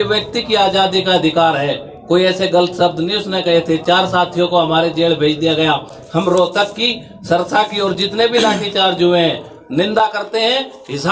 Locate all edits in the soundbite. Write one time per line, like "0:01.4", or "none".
none